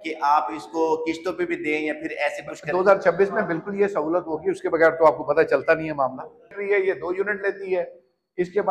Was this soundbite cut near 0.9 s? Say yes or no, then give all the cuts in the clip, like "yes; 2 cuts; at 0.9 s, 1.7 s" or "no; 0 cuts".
no; 1 cut; at 6.6 s